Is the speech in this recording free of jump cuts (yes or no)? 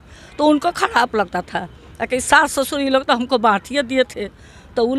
yes